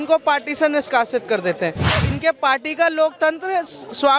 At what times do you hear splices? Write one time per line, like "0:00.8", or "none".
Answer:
0:02.0